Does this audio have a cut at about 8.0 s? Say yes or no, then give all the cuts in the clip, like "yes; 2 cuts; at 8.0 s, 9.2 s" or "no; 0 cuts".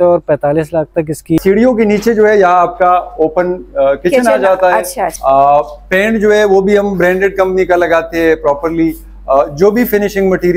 no; 2 cuts; at 1.4 s, 5.0 s